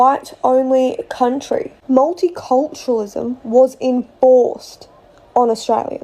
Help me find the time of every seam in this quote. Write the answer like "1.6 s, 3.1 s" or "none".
1.4 s